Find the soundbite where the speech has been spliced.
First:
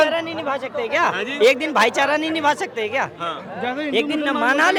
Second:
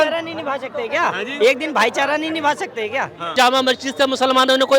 second; 1 cut; at 3.3 s

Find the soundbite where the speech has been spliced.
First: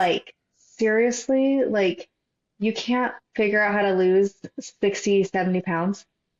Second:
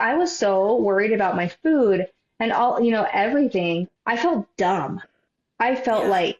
second; 1 cut; at 3.9 s

